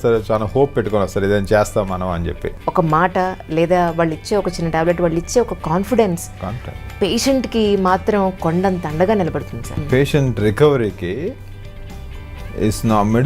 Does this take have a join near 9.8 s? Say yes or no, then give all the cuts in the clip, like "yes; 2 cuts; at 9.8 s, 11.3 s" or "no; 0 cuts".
yes; 2 cuts; at 2.5 s, 9.8 s